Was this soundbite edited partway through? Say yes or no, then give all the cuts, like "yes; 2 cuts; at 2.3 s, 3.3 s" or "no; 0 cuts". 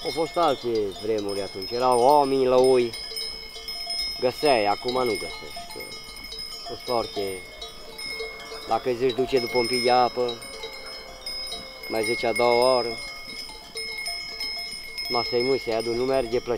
no; 0 cuts